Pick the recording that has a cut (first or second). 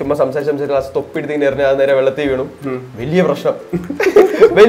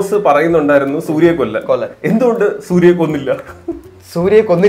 second